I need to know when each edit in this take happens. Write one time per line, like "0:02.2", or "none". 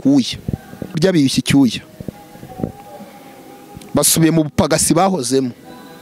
0:01.0